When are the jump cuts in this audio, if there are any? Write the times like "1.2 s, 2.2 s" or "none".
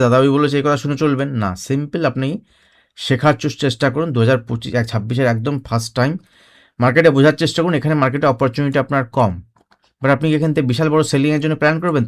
none